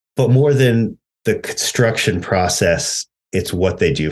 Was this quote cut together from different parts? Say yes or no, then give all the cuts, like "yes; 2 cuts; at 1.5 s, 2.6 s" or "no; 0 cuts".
yes; 1 cut; at 1.1 s